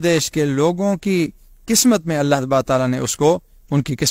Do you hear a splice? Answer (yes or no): no